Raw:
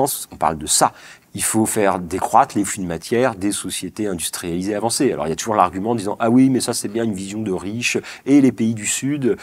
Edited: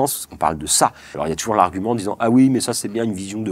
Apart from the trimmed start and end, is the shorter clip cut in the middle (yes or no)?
yes